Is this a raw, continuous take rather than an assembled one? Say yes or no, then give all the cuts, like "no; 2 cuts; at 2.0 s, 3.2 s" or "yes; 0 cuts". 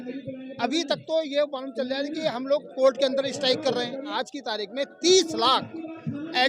no; 1 cut; at 4.1 s